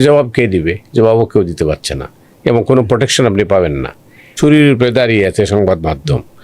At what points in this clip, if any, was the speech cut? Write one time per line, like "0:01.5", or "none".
0:04.3